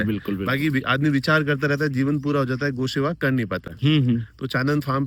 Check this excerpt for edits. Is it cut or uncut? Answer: uncut